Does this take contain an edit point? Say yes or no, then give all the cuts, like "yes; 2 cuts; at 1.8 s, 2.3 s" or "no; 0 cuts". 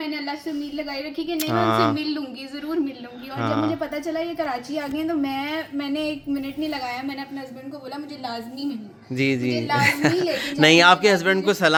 no; 0 cuts